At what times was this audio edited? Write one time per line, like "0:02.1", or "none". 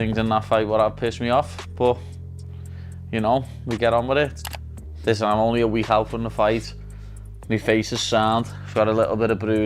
0:04.4